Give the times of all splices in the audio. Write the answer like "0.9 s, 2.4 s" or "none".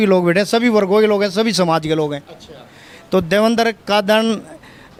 none